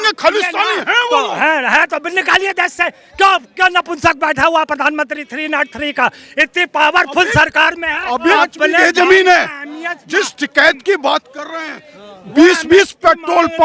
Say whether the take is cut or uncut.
cut